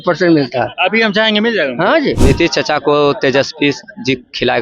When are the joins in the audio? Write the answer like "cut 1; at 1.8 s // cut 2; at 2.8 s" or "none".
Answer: cut 1; at 2.2 s